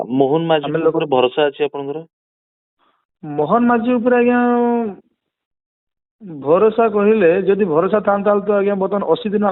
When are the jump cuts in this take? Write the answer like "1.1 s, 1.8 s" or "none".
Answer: none